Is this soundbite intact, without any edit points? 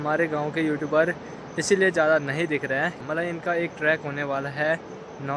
no; 1 cut; at 3.0 s

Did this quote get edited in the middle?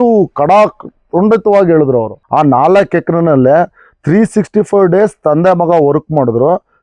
yes; 1 cut; at 2.2 s

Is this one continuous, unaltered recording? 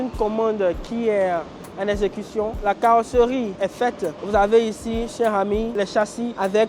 yes; 0 cuts

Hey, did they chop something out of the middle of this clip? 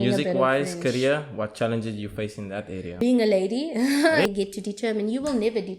yes; 2 cuts; at 3.0 s, 4.3 s

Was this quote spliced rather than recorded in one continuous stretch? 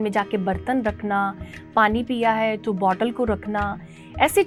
no; 0 cuts

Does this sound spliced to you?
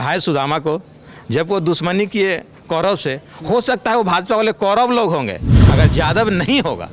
yes; 1 cut; at 5.5 s

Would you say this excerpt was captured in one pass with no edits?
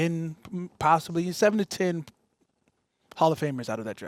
yes; 0 cuts

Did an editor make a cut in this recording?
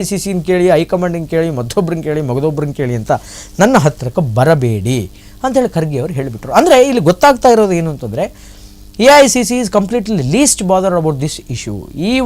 no; 0 cuts

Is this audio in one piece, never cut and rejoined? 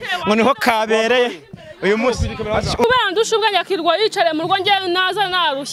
no; 1 cut; at 2.8 s

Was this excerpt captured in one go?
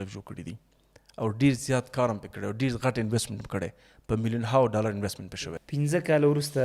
no; 1 cut; at 5.2 s

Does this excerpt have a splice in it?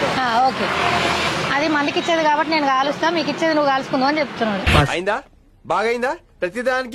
no; 0 cuts

